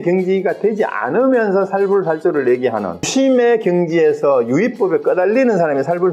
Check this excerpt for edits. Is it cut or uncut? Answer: cut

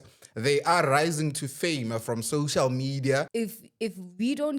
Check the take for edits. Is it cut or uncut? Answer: cut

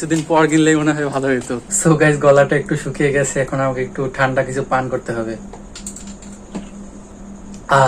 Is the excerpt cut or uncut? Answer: cut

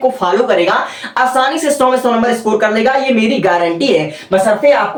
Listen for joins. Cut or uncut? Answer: uncut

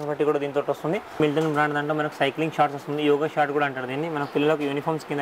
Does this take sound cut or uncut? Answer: cut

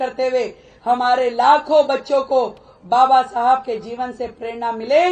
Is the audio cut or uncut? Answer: uncut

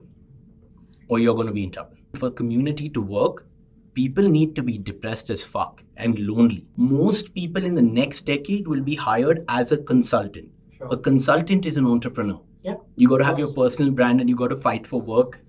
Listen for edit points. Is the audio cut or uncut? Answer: cut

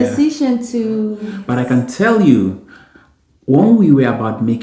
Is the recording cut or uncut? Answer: cut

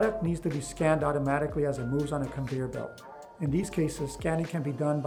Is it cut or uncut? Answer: uncut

